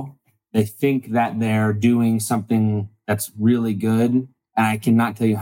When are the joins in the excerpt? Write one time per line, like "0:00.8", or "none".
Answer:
none